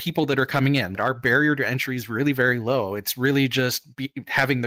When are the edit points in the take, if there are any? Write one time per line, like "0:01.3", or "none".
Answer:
0:01.0